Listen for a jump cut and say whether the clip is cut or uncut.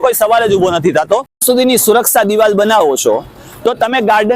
cut